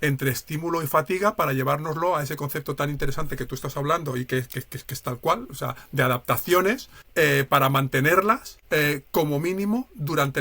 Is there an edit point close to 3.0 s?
no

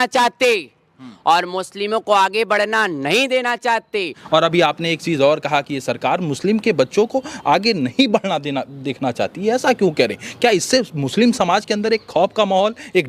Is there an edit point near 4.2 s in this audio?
yes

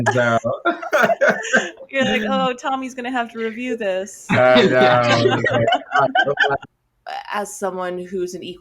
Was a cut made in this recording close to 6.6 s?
yes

